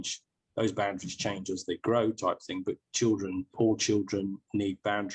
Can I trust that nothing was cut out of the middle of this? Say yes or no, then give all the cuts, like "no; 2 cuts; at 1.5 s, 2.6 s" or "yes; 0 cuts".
no; 1 cut; at 3.5 s